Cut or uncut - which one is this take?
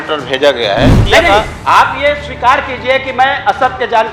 cut